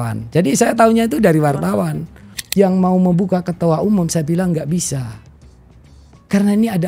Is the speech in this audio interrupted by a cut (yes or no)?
yes